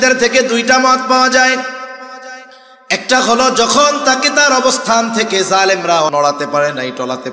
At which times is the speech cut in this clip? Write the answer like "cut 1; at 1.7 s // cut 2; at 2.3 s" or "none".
cut 1; at 6.1 s